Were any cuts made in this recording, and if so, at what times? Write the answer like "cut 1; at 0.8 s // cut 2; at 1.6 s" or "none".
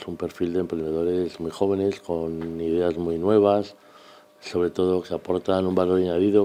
none